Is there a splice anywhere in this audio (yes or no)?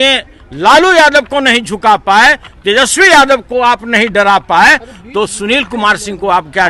no